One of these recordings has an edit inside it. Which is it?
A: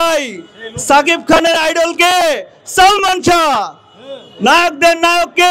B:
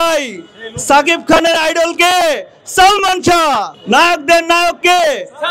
B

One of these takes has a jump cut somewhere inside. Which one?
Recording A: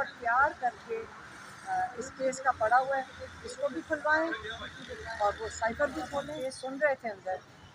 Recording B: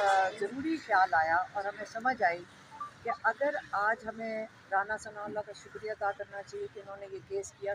A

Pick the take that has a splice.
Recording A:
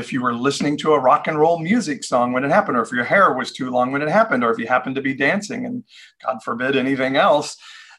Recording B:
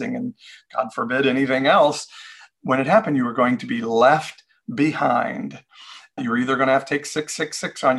B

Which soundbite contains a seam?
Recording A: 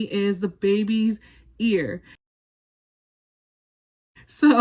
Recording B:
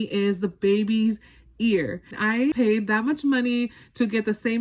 B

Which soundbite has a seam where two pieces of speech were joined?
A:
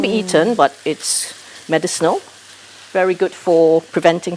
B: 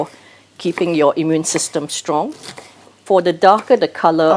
B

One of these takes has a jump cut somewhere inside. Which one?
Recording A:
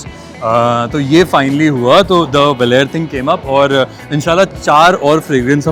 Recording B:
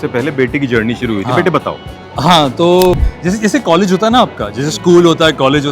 B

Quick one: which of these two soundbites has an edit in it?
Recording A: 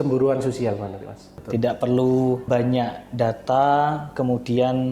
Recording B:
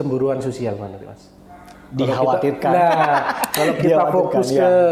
A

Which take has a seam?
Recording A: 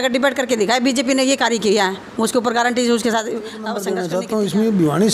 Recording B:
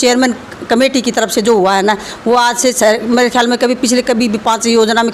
A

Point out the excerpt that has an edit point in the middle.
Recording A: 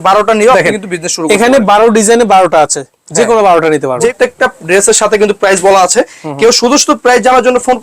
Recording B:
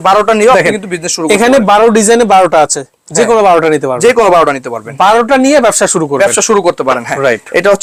A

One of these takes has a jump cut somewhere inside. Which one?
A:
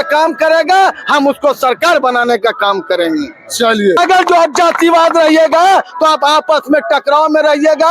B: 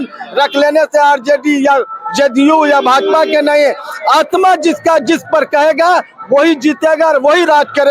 A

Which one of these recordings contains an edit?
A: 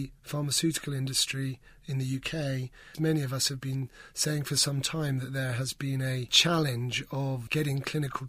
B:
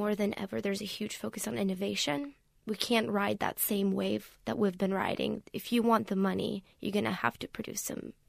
A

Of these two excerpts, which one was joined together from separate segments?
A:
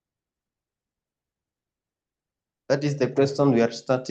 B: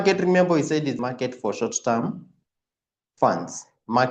B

